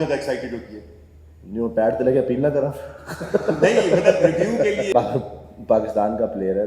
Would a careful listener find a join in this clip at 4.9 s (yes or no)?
yes